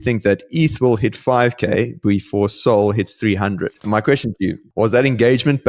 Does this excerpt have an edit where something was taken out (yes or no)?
yes